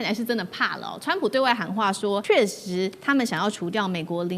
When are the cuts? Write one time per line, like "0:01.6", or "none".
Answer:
0:02.2